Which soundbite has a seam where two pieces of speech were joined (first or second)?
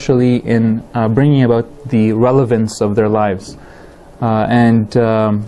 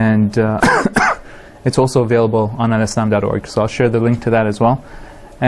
second